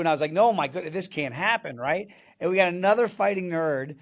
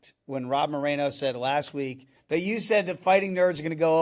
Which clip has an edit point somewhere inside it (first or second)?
second